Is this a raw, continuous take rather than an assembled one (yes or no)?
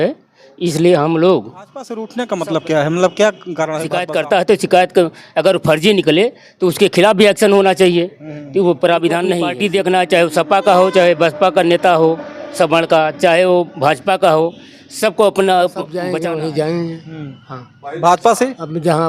no